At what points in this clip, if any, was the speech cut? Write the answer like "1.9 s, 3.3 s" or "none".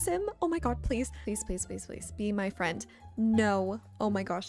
none